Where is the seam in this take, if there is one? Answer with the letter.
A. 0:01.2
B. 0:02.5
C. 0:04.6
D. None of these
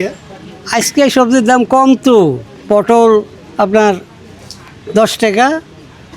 B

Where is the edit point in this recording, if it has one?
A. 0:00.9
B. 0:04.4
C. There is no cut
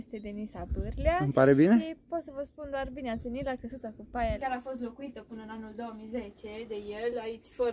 B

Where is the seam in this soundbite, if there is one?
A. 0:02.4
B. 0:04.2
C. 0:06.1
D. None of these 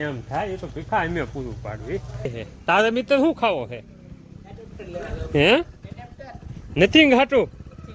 A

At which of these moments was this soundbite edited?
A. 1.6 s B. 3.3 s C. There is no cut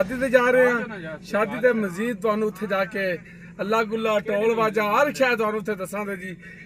C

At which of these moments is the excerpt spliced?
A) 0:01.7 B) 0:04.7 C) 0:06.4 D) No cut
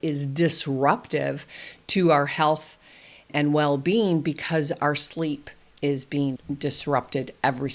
C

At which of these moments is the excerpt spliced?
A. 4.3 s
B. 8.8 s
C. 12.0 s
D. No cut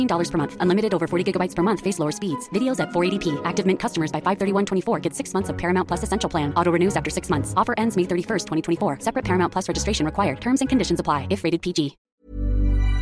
C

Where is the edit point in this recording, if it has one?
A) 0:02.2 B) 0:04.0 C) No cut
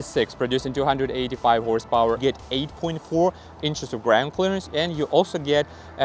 A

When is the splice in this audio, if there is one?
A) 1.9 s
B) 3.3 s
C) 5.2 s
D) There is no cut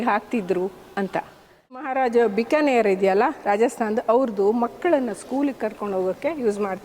A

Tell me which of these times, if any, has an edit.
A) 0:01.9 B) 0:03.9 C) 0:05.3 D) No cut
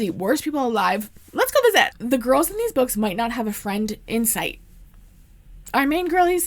A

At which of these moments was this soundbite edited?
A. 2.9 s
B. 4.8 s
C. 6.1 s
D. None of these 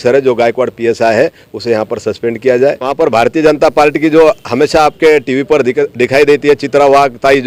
A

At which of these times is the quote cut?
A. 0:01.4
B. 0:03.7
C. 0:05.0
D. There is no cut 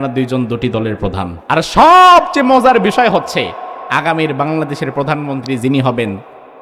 A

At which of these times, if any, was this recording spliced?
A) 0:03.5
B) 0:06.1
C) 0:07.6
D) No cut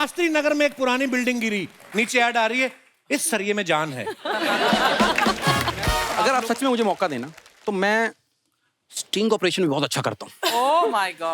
B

